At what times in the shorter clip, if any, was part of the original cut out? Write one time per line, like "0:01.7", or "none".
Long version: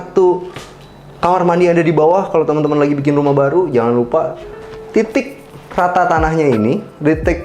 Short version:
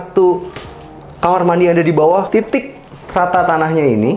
0:02.3